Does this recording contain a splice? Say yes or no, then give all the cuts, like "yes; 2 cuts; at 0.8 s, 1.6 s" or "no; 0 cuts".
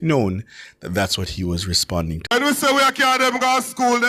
yes; 1 cut; at 2.3 s